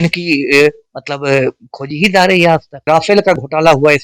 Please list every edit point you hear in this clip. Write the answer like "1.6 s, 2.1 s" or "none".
2.7 s

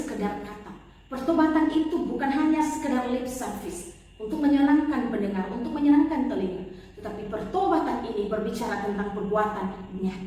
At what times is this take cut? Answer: none

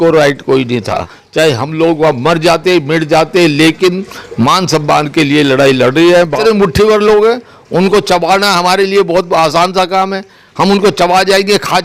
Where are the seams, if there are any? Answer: 1.2 s, 6.4 s

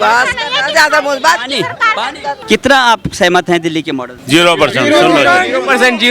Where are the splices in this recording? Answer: 2.4 s, 4.1 s

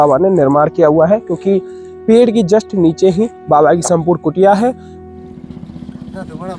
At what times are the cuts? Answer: 4.9 s

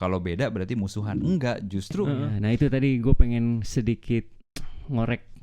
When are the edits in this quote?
2.3 s

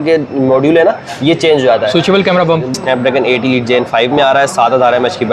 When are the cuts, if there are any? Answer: 2.8 s

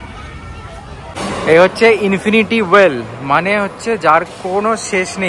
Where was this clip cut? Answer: 1.2 s

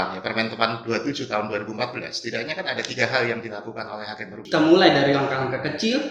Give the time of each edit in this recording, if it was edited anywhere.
4.3 s

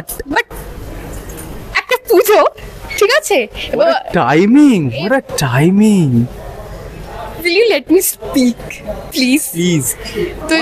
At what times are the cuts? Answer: none

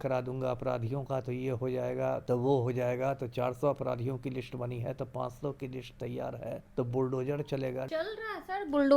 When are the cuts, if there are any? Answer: 2.2 s, 6.6 s, 7.9 s

